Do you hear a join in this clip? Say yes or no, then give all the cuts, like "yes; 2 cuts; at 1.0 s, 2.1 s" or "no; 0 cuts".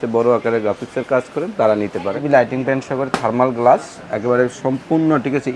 yes; 1 cut; at 2.2 s